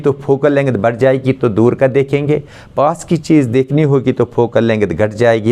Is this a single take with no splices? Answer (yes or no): yes